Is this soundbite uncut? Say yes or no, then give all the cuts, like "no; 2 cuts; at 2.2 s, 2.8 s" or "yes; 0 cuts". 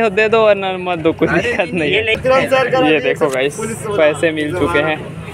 no; 1 cut; at 2.1 s